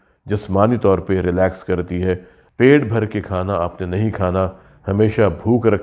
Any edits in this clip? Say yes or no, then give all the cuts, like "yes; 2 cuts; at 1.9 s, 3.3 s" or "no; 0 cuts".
yes; 1 cut; at 2.4 s